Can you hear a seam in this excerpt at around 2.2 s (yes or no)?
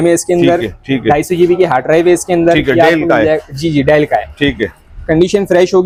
no